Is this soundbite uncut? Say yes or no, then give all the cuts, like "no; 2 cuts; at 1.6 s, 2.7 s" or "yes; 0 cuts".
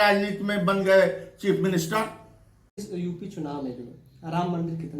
no; 1 cut; at 2.8 s